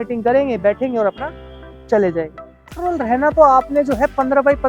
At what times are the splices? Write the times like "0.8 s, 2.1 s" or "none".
2.8 s

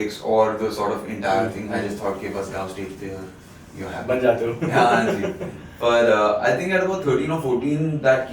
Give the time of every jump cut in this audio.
none

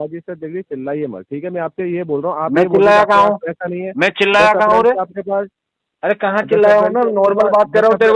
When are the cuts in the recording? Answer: none

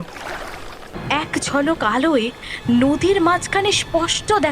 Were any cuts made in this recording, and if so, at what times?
0.9 s

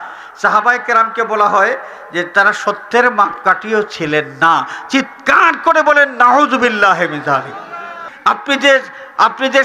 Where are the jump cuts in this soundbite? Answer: 8.0 s

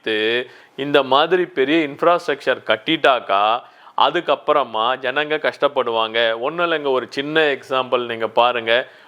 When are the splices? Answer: none

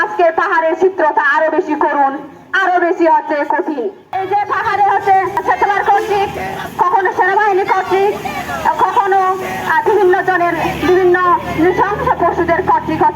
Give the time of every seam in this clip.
4.0 s

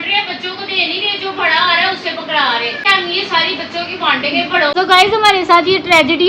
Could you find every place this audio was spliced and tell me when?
2.8 s, 4.7 s

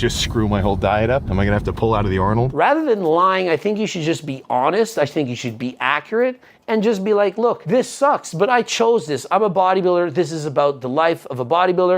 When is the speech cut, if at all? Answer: 1.3 s, 2.5 s, 7.6 s

